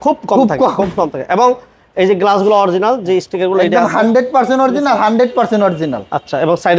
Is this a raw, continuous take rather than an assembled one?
yes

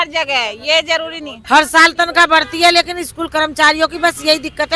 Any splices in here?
yes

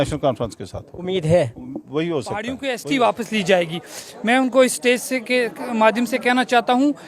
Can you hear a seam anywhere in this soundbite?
yes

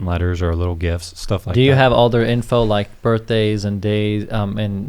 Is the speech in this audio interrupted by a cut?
no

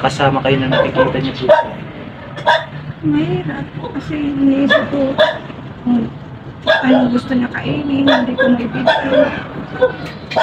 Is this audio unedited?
yes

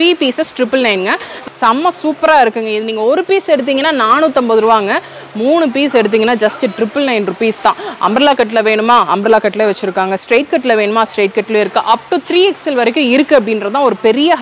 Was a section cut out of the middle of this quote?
yes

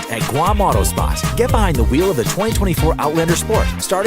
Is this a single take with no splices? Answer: no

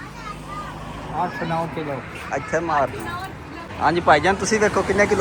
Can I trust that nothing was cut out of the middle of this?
no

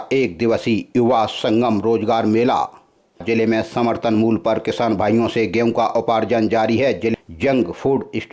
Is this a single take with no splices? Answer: no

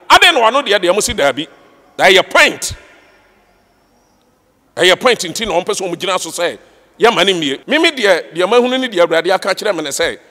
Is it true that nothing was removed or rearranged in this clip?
no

